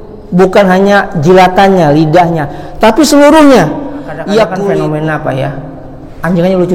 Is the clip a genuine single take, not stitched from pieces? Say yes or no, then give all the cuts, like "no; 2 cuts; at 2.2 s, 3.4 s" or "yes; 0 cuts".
no; 1 cut; at 4.5 s